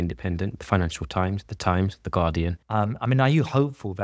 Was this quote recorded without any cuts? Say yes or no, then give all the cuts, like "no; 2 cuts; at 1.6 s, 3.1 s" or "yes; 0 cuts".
no; 1 cut; at 2.6 s